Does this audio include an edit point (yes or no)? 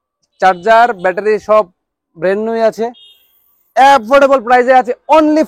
no